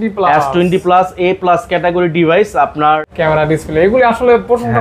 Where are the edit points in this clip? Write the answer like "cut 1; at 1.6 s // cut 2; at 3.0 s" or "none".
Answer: cut 1; at 3.1 s